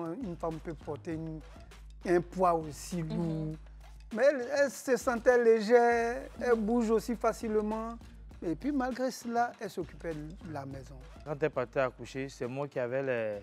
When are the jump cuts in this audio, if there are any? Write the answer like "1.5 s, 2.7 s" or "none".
11.2 s